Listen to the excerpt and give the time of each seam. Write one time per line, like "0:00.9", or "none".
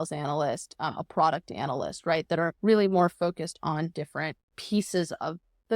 0:02.6
0:04.5